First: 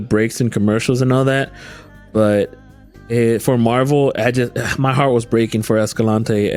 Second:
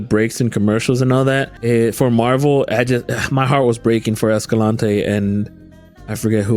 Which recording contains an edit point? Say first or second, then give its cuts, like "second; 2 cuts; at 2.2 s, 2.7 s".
second; 1 cut; at 1.5 s